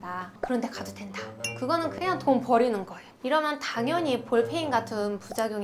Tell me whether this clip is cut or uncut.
cut